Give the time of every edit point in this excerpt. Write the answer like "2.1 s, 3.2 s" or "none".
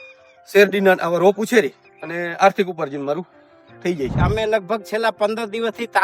4.2 s